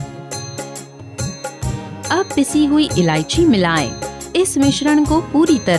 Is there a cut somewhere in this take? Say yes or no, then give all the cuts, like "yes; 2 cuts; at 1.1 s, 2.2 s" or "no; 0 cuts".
yes; 1 cut; at 1.5 s